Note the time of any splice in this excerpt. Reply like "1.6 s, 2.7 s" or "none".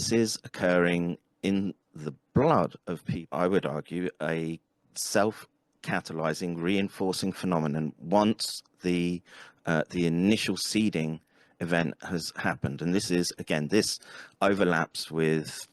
3.1 s